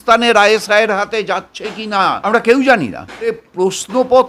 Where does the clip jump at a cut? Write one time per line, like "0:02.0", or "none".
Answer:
0:02.2
0:03.4